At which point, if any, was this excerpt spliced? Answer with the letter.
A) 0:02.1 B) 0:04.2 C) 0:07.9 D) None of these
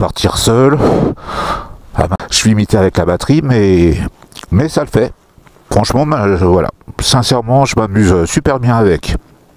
A